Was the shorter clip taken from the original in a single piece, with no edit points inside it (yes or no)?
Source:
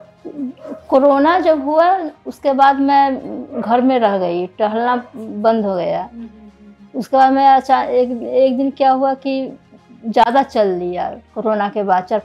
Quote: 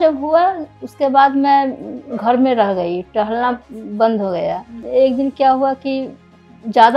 no